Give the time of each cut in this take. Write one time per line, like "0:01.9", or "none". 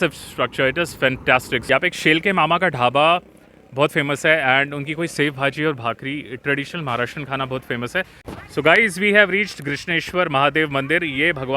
0:01.6
0:08.3

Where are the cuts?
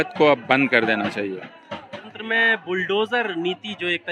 0:02.1

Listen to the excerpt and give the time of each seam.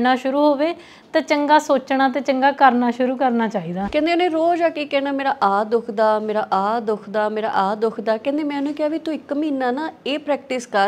0:03.8

